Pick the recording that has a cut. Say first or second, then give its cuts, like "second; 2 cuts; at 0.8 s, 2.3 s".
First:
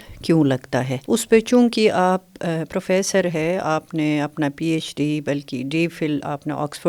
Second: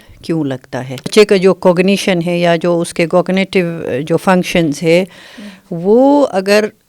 second; 1 cut; at 1.1 s